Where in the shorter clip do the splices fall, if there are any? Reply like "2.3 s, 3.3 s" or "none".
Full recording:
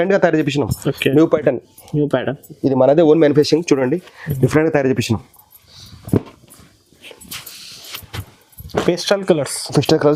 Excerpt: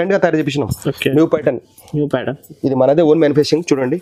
none